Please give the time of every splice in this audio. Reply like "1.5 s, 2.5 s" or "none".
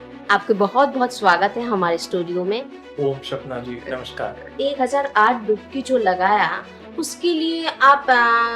2.8 s, 4.5 s